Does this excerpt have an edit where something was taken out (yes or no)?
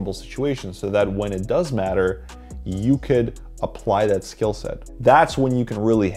no